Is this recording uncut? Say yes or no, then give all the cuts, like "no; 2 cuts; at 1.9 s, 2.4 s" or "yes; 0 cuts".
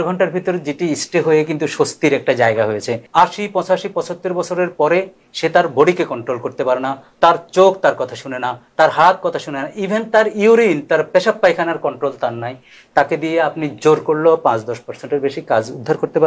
no; 1 cut; at 3.0 s